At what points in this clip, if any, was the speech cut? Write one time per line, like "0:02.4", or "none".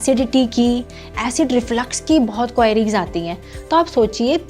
none